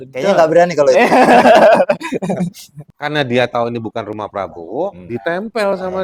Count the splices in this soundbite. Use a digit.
0